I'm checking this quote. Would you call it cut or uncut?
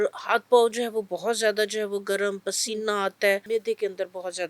cut